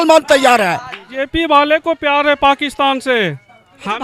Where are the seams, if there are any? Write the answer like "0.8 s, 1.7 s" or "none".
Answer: 1.0 s